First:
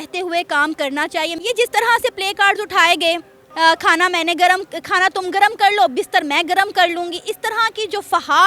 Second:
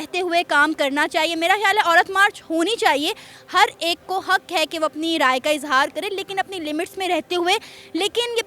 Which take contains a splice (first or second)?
first